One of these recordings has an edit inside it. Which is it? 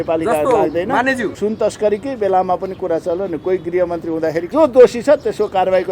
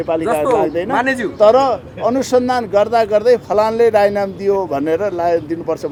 first; 2 cuts; at 1.3 s, 4.5 s

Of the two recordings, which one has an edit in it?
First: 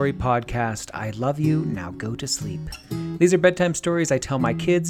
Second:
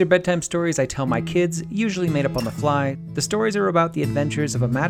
second; 1 cut; at 3.0 s

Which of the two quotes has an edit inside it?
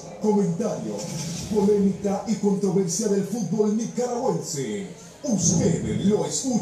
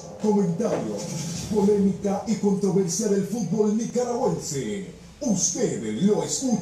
second; 1 cut; at 3.9 s

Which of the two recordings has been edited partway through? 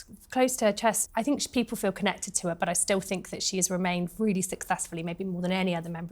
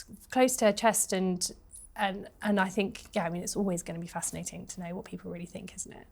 first; 1 cut; at 1.0 s

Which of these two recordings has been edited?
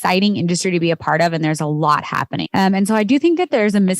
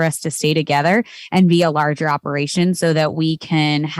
first; 1 cut; at 2.6 s

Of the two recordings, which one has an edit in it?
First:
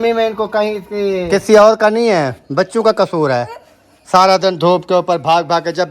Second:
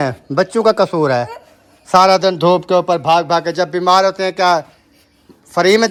first; 1 cut; at 1.2 s

